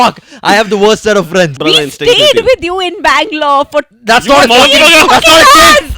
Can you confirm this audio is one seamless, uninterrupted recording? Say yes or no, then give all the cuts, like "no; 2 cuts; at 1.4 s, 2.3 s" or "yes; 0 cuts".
no; 1 cut; at 1.5 s